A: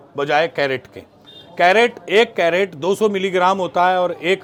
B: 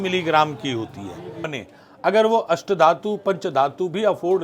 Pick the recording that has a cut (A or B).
B